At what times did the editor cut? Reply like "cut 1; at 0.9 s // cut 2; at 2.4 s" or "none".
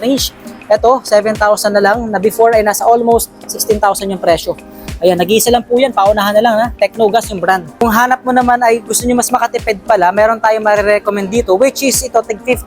cut 1; at 7.8 s